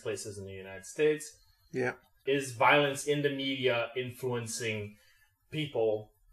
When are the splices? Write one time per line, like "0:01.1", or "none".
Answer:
0:01.5